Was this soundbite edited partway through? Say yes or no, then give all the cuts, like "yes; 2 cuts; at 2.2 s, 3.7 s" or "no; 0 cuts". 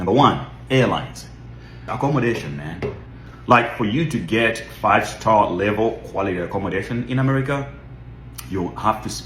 yes; 1 cut; at 1.9 s